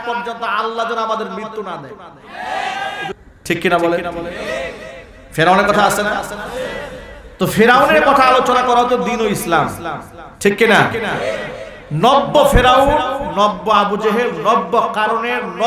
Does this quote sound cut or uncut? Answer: cut